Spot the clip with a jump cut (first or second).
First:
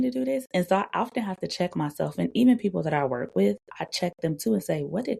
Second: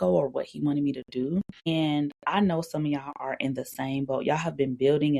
second